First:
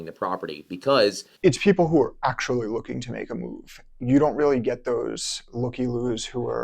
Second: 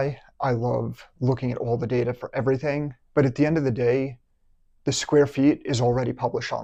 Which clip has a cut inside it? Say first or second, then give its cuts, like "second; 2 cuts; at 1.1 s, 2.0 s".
first; 1 cut; at 1.3 s